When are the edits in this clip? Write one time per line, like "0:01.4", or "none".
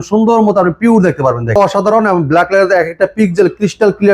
0:01.6